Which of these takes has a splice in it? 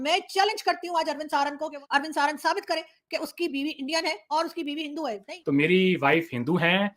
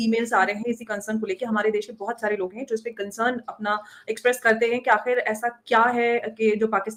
first; 2 cuts; at 1.8 s, 5.3 s

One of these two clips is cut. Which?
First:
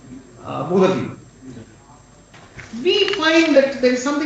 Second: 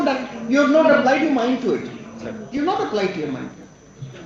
first; 1 cut; at 2.4 s

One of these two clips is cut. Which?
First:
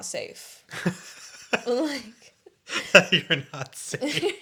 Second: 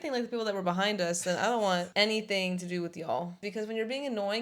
second; 2 cuts; at 1.9 s, 3.4 s

